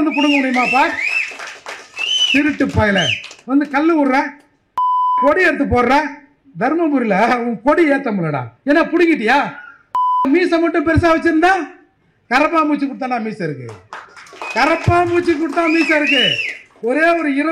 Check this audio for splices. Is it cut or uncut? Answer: cut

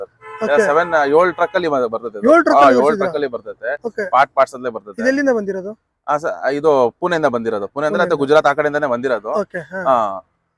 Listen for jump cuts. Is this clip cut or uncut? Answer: uncut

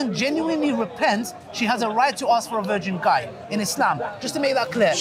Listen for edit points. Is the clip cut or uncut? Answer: uncut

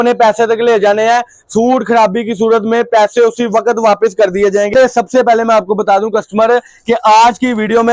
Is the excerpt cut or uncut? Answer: cut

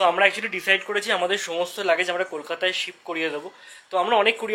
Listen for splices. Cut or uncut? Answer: uncut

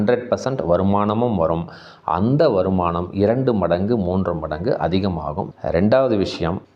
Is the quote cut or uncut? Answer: cut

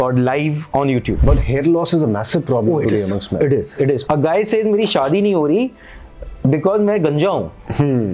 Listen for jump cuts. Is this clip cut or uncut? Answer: cut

